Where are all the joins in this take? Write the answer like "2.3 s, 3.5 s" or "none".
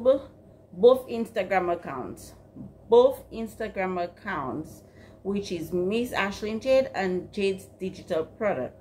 none